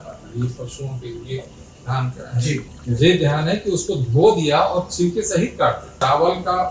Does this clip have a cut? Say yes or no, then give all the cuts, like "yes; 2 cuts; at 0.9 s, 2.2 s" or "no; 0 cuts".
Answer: yes; 2 cuts; at 2.7 s, 5.9 s